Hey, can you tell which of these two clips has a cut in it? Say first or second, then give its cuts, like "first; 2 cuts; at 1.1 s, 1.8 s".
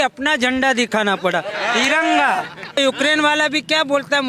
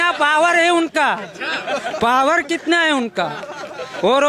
first; 1 cut; at 2.8 s